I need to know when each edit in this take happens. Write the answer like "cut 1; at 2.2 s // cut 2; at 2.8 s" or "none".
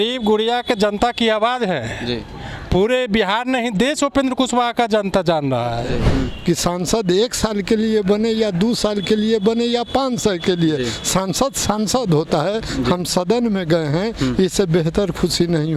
cut 1; at 6.1 s